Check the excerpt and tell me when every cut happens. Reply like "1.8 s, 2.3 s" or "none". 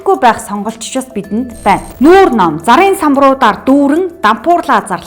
1.9 s